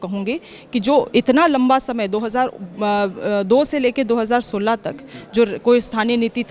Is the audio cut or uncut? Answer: uncut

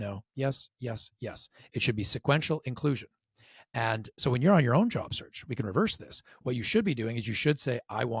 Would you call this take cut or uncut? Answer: uncut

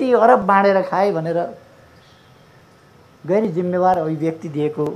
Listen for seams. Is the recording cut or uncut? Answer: uncut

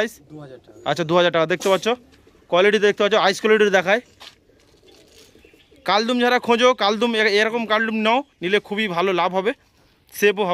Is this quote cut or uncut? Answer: cut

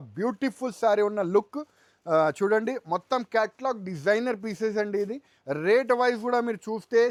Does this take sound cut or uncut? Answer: uncut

